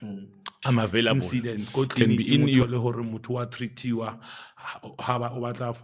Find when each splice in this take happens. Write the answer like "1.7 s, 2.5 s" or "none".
2.6 s

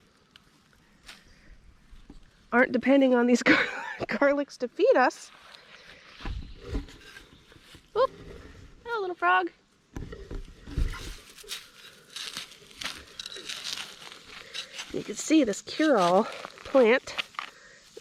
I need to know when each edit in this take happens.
none

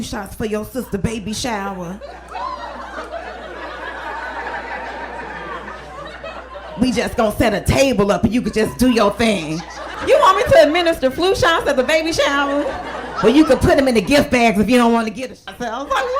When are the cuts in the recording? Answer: 15.2 s

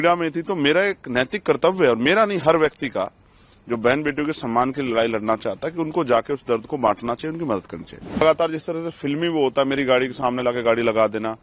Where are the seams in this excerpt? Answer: 8.2 s

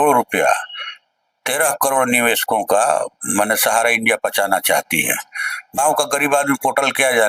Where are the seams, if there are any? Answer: 5.8 s

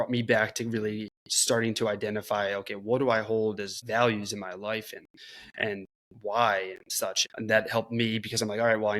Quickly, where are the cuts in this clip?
3.7 s, 7.2 s

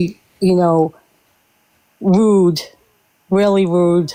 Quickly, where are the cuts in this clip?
none

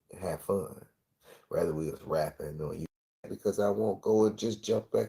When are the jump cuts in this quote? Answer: 3.3 s

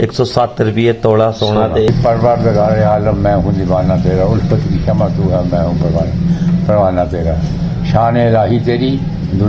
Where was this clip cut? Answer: 1.9 s

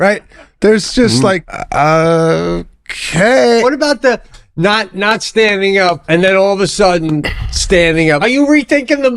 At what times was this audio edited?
1.5 s, 3.6 s, 6.0 s, 8.2 s

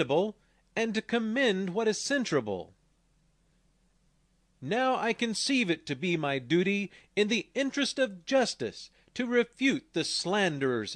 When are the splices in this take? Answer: none

